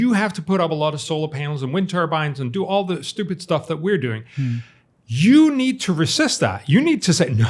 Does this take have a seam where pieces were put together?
no; 0 cuts

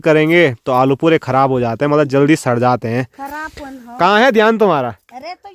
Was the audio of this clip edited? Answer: no; 0 cuts

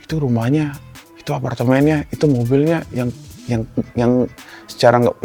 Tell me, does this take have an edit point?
no; 0 cuts

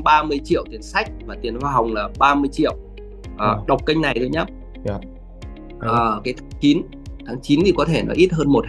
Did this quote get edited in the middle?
no; 0 cuts

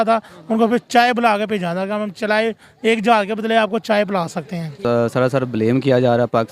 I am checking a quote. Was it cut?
yes; 1 cut; at 4.8 s

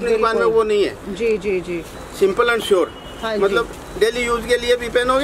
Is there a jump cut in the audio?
yes; 1 cut; at 2.0 s

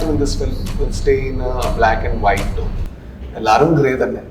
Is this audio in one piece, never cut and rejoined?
yes; 0 cuts

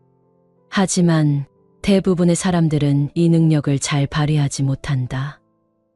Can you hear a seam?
no; 0 cuts

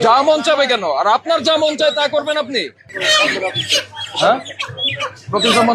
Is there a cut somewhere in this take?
no; 0 cuts

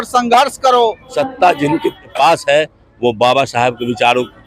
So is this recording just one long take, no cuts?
no; 2 cuts; at 1.1 s, 2.1 s

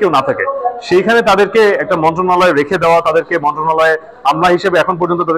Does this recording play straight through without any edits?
yes; 0 cuts

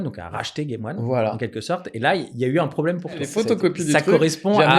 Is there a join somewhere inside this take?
yes; 1 cut; at 3.3 s

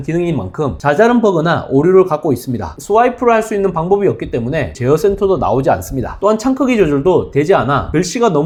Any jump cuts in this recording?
no; 0 cuts

